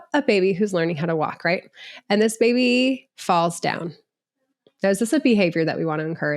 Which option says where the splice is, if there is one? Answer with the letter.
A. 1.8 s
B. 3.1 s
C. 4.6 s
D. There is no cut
B